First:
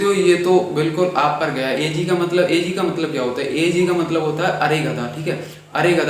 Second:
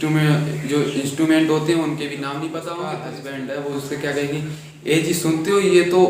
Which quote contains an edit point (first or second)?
second